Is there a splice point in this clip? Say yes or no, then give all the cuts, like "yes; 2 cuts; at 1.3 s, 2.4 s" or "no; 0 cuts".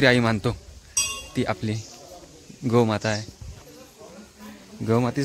no; 0 cuts